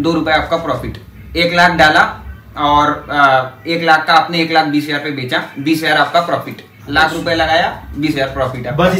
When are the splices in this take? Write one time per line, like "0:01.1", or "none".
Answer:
none